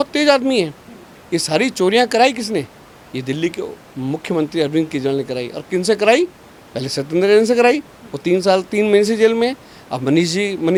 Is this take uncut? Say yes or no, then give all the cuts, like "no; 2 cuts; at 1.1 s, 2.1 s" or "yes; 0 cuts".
yes; 0 cuts